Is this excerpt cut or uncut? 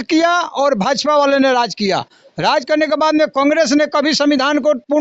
uncut